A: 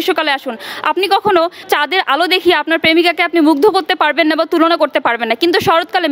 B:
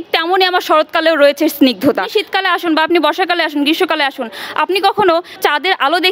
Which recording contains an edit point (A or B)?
B